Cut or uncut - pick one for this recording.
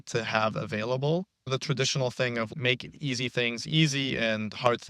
cut